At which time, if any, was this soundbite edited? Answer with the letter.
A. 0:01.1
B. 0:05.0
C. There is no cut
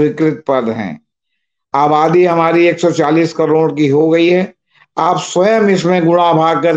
C